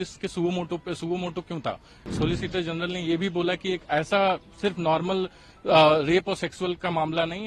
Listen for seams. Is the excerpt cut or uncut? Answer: cut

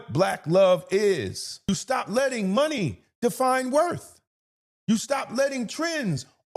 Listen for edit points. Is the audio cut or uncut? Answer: cut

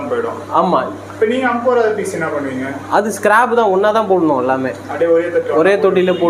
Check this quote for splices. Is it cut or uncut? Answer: uncut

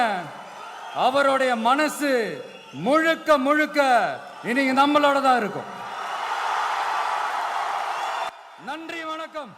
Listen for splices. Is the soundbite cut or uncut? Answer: uncut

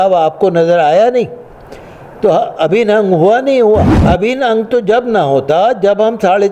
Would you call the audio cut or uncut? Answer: cut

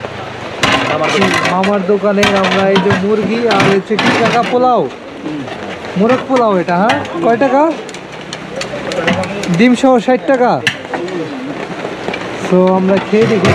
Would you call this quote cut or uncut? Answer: uncut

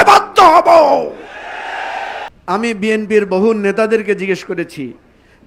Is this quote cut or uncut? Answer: cut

